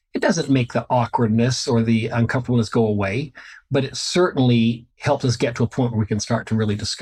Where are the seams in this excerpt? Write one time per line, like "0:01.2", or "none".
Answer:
none